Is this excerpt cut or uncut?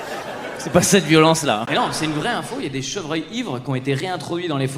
cut